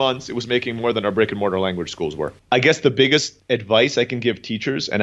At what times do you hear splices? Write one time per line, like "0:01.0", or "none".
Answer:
0:02.3
0:03.3